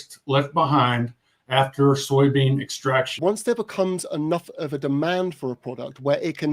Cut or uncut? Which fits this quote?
cut